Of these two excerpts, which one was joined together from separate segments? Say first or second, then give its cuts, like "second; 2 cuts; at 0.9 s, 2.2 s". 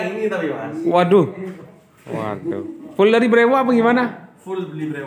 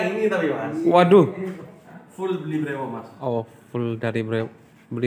second; 1 cut; at 2.0 s